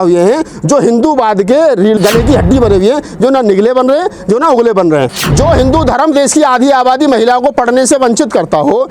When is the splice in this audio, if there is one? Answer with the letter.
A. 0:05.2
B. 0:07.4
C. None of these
A